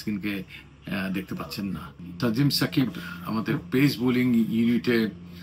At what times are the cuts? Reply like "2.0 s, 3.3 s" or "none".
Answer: 1.9 s